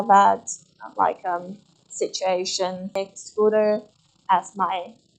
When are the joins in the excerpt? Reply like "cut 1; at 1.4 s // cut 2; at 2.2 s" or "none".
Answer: cut 1; at 2.9 s